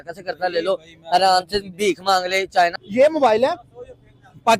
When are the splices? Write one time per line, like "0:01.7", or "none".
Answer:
0:02.8